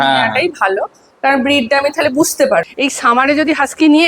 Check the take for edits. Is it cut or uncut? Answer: cut